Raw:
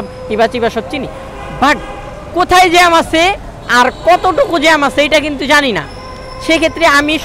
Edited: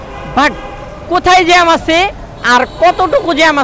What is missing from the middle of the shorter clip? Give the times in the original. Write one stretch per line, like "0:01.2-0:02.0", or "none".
none